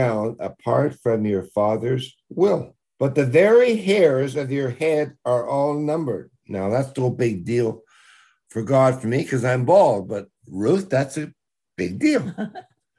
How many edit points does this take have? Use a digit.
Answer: 1